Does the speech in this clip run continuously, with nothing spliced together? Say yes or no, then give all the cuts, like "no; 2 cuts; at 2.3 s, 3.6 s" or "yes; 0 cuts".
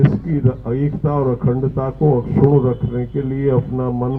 yes; 0 cuts